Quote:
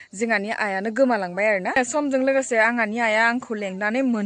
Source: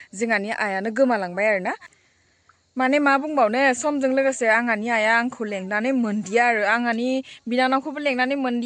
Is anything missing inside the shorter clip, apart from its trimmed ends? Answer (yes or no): yes